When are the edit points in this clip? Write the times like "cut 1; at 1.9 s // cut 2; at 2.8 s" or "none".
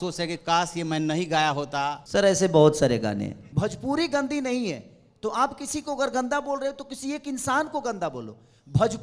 cut 1; at 2.0 s // cut 2; at 3.4 s